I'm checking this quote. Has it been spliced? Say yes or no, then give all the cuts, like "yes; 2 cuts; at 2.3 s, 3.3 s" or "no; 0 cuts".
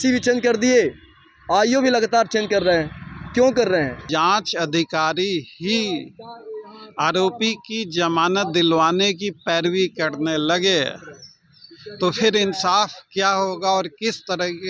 yes; 1 cut; at 4.0 s